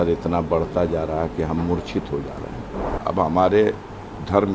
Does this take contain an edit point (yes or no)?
yes